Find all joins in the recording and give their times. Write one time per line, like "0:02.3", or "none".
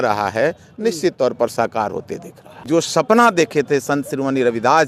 0:02.5

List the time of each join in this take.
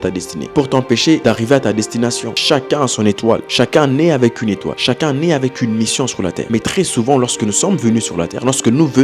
0:01.2
0:02.3
0:04.7
0:06.4

